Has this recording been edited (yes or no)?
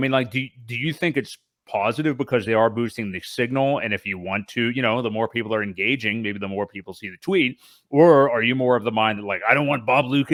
no